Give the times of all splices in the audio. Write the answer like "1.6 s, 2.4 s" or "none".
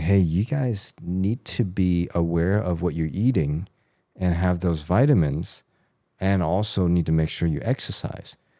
none